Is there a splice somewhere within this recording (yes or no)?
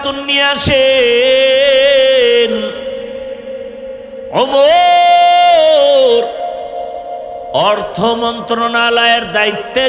no